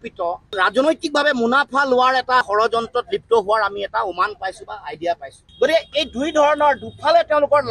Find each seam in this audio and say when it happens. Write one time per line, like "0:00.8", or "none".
0:05.4